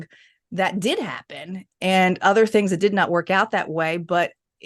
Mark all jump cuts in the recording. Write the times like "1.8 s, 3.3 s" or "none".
none